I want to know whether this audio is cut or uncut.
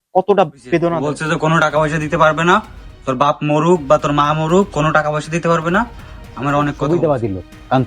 cut